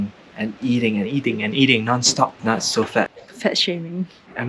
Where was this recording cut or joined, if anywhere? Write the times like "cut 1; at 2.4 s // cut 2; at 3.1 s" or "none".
cut 1; at 2.4 s // cut 2; at 3.2 s